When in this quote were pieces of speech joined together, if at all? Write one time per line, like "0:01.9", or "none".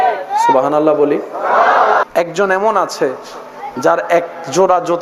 0:02.0